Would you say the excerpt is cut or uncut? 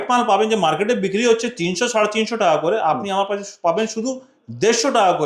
uncut